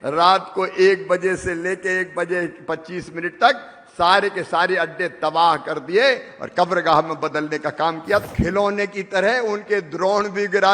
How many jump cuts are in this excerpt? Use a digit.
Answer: 1